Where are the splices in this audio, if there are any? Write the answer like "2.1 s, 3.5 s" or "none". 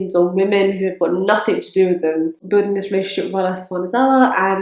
2.3 s